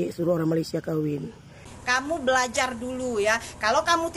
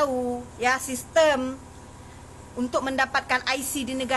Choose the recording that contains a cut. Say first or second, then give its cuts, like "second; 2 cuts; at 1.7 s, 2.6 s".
first; 1 cut; at 1.7 s